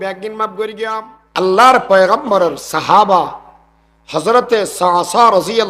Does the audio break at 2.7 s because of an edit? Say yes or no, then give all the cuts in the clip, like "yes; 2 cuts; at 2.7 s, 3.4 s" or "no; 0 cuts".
no; 1 cut; at 1.4 s